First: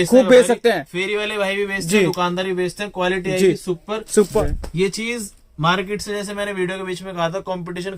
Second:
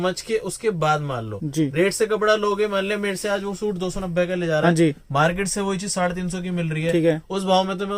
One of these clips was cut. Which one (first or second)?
first